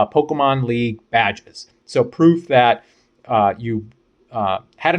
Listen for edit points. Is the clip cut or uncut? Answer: uncut